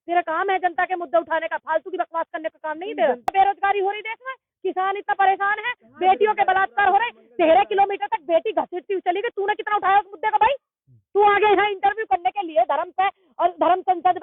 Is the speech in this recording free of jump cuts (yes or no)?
yes